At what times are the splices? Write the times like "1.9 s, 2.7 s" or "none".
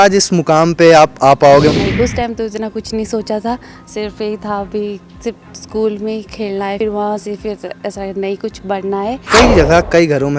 1.7 s, 6.8 s, 9.2 s